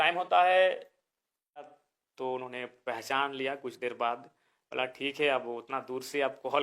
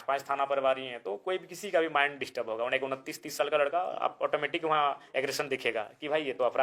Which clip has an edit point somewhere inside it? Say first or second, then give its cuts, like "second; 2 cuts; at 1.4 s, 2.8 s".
first; 1 cut; at 1.8 s